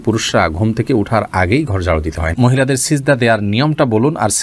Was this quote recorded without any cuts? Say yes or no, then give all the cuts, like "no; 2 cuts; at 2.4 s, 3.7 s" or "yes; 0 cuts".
no; 1 cut; at 2.3 s